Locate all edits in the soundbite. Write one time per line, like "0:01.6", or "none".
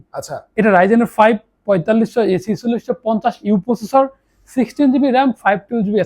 none